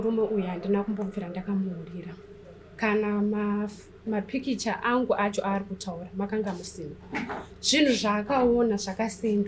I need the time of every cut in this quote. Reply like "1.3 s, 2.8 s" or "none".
none